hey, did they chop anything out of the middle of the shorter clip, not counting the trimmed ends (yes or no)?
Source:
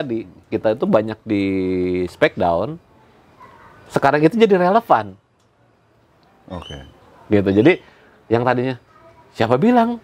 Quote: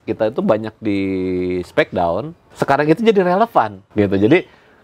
yes